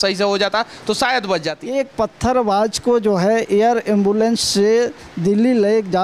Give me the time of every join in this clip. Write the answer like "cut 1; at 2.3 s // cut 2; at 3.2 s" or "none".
cut 1; at 1.5 s